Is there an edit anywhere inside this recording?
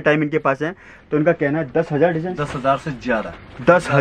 no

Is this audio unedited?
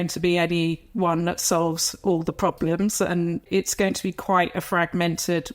no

